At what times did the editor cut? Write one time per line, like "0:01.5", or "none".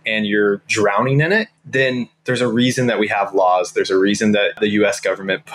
0:01.6
0:04.6